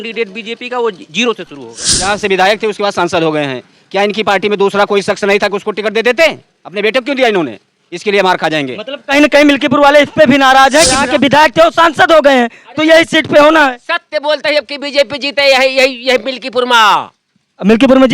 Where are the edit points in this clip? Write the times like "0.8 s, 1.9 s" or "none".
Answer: 1.9 s, 11.0 s

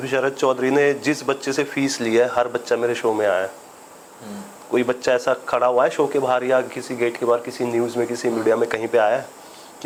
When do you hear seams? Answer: none

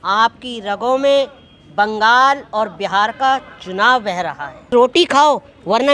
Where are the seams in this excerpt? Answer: 4.7 s

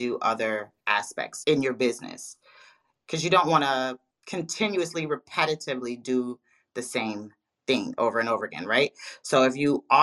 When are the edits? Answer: 1.3 s

